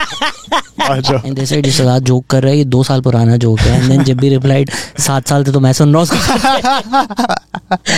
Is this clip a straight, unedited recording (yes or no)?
no